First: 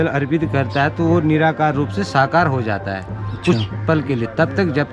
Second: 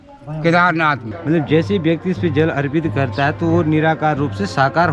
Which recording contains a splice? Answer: second; 1 cut; at 1.1 s

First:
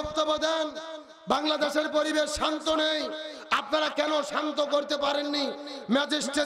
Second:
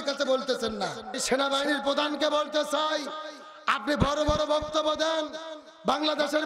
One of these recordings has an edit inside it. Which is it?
second; 1 cut; at 1.2 s

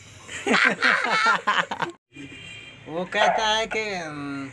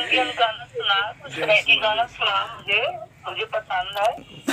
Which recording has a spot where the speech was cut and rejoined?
first; 1 cut; at 2.0 s

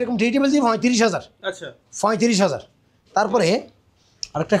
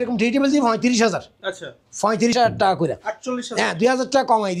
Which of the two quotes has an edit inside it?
second; 1 cut; at 2.3 s

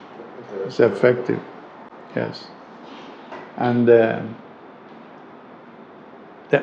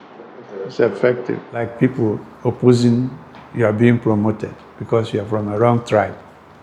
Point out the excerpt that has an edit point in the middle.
second; 1 cut; at 1.7 s

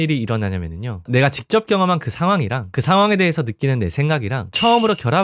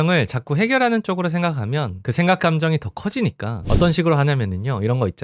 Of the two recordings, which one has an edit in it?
second; 1 cut; at 3.5 s

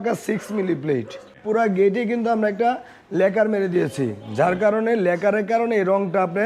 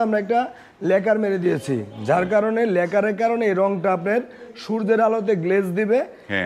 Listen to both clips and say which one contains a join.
first; 1 cut; at 1.4 s

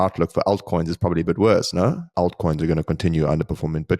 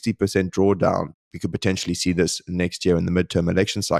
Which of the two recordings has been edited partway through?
first; 1 cut; at 2.0 s

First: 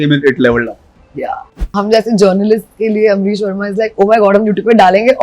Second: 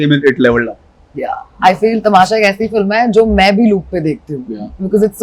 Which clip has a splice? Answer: first; 1 cut; at 1.6 s

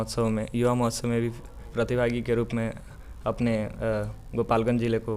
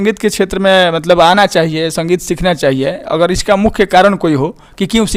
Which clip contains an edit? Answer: first; 1 cut; at 1.7 s

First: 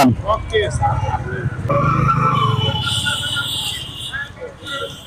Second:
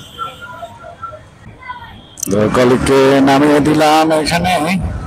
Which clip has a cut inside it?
first; 1 cut; at 1.7 s

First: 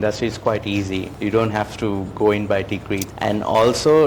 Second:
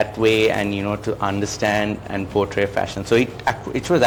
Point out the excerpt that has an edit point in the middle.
first; 2 cuts; at 1.1 s, 3.1 s

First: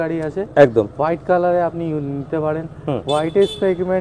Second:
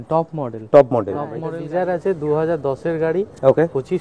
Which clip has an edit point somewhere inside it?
second; 1 cut; at 1.5 s

